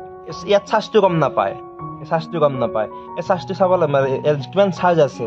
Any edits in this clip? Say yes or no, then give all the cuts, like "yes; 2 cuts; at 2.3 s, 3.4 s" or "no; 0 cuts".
no; 0 cuts